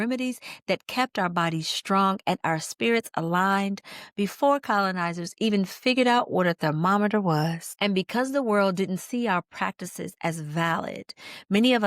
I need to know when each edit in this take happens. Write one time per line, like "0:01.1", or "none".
0:07.7